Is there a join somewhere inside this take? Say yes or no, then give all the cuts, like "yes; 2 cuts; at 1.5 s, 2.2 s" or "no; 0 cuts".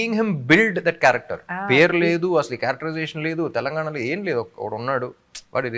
no; 0 cuts